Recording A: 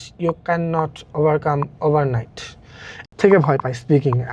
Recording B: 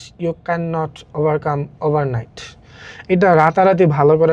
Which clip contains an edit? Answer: A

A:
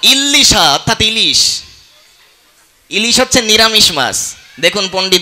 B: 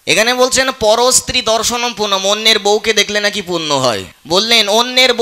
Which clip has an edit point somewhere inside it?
B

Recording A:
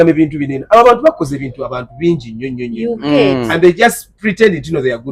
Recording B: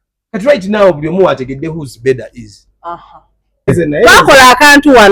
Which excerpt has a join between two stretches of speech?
B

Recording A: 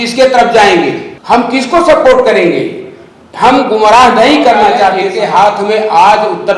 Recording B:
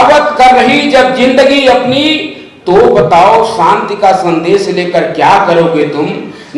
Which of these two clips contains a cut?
A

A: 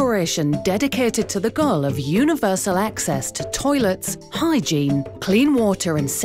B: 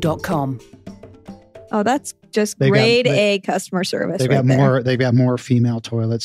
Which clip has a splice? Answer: B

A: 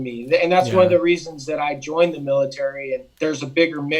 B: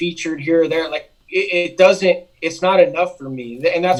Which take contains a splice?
A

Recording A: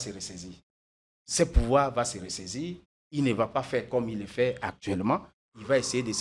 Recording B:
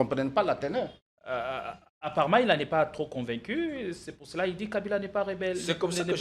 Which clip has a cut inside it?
B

